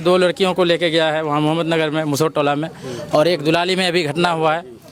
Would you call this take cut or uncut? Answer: uncut